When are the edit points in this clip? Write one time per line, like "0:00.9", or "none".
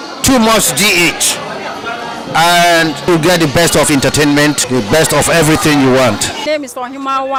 none